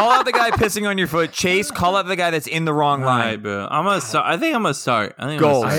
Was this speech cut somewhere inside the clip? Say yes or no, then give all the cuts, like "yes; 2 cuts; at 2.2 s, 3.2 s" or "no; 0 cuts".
no; 0 cuts